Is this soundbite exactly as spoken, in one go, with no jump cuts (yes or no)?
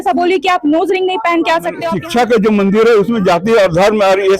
no